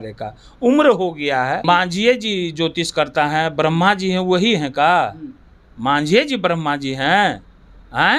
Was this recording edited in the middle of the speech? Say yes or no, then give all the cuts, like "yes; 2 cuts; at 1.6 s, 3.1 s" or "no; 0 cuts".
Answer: yes; 1 cut; at 1.6 s